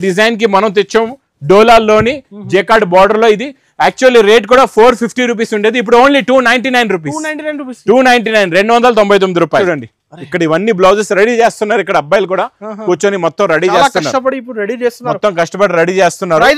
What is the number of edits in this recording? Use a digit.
1